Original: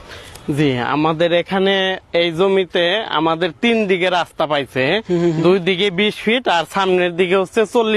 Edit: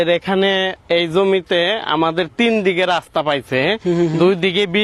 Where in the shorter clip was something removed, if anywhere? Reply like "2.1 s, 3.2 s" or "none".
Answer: none